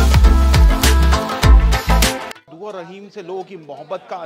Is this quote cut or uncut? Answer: cut